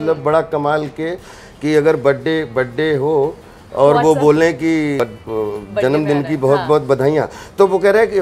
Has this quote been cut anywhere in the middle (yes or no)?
yes